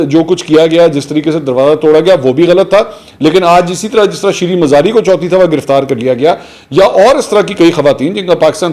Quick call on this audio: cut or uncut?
uncut